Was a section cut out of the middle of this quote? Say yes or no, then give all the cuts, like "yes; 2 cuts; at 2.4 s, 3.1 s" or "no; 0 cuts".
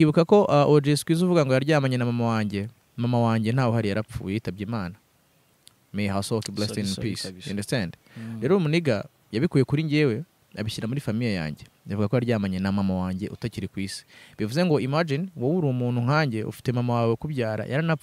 no; 0 cuts